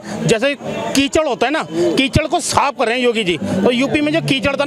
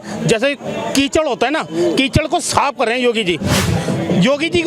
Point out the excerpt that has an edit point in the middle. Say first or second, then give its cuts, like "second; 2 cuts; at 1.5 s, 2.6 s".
second; 1 cut; at 3.6 s